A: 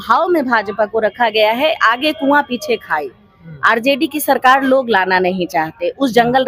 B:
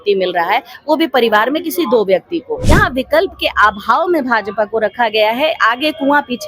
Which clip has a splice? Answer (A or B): B